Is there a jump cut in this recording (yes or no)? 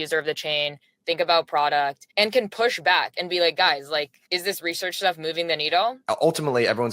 yes